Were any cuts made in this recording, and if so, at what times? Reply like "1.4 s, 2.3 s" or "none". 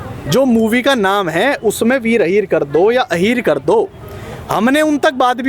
none

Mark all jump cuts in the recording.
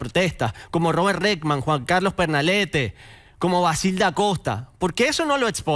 none

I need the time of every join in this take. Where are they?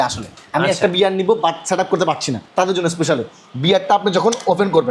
2.4 s

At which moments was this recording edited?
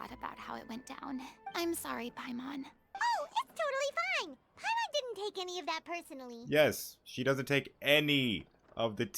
2.8 s

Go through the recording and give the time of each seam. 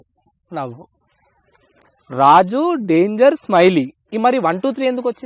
none

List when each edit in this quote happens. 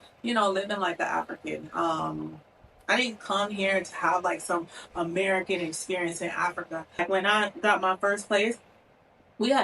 7.0 s

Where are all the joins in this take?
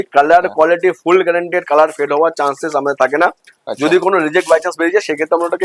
none

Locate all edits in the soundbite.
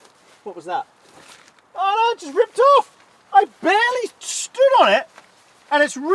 none

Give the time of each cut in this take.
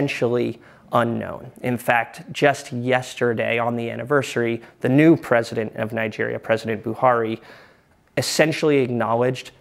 1.5 s

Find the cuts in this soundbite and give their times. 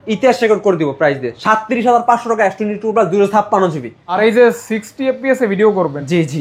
4.0 s

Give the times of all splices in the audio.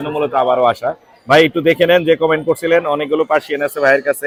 none

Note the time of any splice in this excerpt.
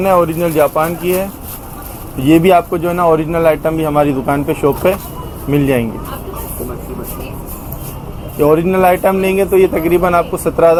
none

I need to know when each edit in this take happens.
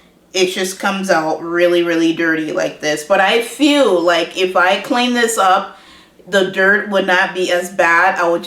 none

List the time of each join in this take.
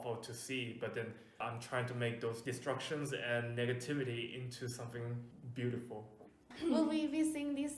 1.4 s, 2.4 s, 5.4 s, 6.5 s

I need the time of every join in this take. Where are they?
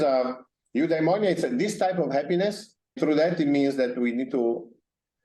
3.0 s

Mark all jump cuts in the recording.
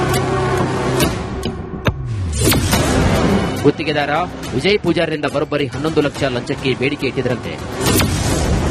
1.1 s

